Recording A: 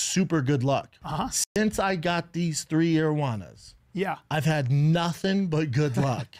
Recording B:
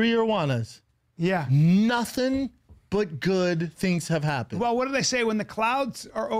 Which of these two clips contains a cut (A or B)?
A